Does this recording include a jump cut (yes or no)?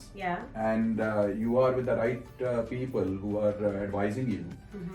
no